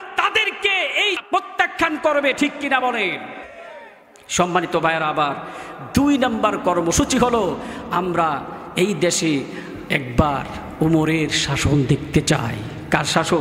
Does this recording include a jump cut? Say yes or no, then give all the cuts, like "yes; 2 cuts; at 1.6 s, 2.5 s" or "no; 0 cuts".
yes; 1 cut; at 1.2 s